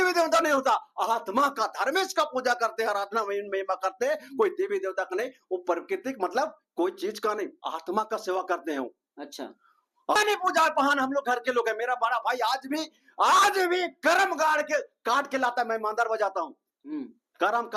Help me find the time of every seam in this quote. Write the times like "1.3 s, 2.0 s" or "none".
10.2 s